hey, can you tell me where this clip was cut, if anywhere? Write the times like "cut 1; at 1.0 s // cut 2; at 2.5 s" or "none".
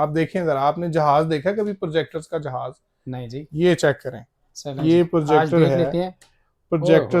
none